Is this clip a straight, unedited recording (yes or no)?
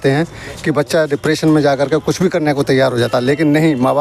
yes